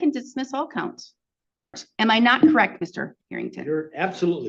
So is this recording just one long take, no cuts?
no; 1 cut; at 1.8 s

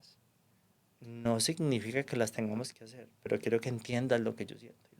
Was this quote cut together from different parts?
no; 0 cuts

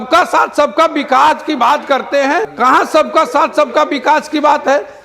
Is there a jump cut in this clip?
yes; 1 cut; at 2.5 s

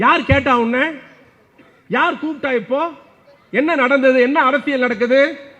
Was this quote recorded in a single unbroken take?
yes; 0 cuts

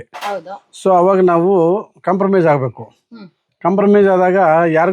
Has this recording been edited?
no; 0 cuts

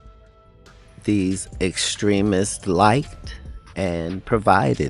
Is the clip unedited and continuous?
no; 1 cut; at 1.0 s

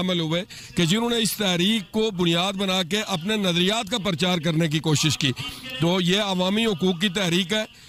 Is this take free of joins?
yes; 0 cuts

